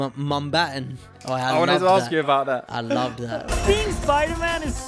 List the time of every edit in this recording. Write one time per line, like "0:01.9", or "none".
none